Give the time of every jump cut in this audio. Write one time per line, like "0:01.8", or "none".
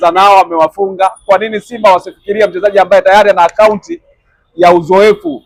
none